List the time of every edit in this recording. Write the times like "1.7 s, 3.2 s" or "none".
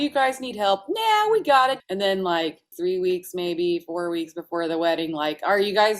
1.8 s, 2.7 s